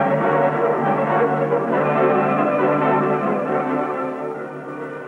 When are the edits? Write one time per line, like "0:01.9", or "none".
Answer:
0:03.7